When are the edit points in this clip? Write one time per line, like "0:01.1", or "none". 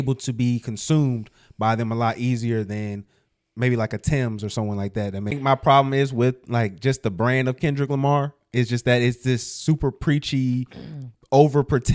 0:05.4